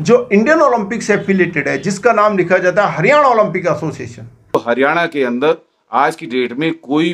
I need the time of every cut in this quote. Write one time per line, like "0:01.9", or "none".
0:04.5